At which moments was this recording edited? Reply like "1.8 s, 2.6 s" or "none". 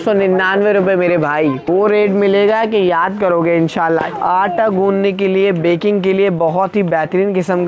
1.6 s, 4.0 s

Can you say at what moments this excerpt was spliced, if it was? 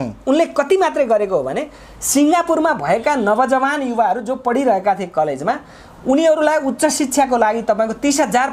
none

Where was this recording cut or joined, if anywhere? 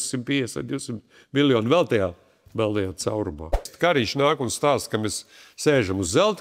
3.7 s

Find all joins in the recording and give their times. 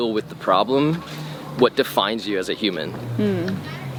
none

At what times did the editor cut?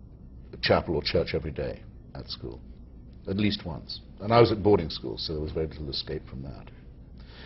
none

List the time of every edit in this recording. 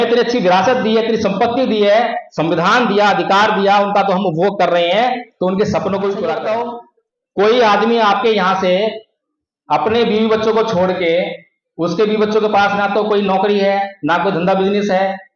6.4 s

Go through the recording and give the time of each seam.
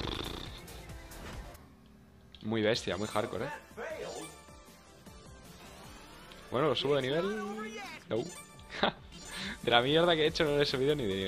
9.2 s

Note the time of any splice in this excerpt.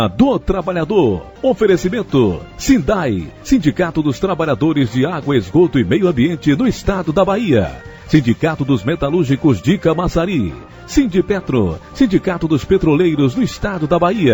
1.3 s, 2.5 s

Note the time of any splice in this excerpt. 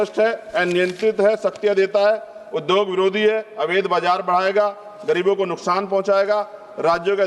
none

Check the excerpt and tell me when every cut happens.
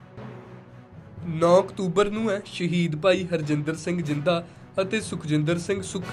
1.2 s

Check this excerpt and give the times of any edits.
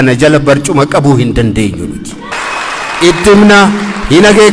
2.3 s

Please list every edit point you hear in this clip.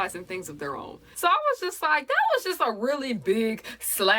1.0 s

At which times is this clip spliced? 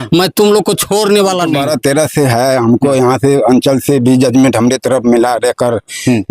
1.6 s

